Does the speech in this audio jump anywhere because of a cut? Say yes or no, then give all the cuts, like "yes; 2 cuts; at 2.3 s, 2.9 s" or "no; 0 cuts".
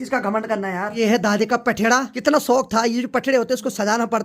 yes; 2 cuts; at 1.0 s, 2.1 s